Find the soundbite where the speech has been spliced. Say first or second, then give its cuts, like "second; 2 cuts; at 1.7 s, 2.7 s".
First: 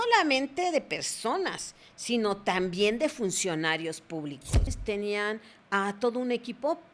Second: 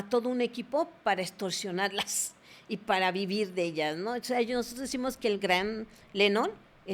first; 1 cut; at 4.7 s